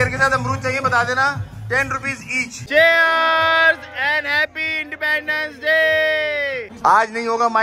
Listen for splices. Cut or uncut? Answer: cut